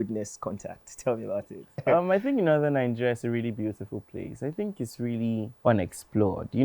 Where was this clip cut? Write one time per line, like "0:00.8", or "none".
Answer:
0:01.8